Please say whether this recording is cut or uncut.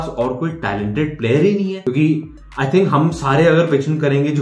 cut